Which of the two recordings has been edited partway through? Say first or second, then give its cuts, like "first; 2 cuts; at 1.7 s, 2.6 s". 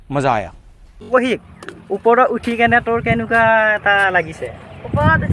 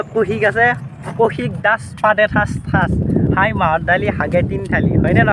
first; 1 cut; at 1.1 s